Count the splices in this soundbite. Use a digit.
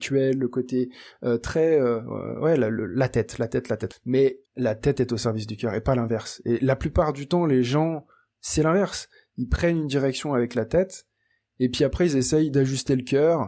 2